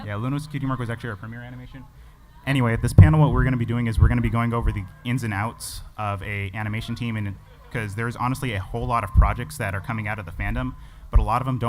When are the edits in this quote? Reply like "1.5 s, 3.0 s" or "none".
7.5 s